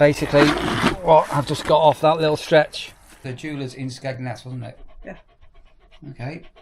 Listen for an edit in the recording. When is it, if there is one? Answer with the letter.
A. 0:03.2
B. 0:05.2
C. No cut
A